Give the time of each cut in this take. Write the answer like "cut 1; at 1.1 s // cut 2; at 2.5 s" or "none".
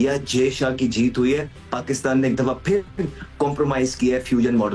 none